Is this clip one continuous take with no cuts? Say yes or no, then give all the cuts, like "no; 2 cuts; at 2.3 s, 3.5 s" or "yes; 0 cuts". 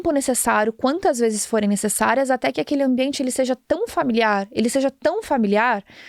yes; 0 cuts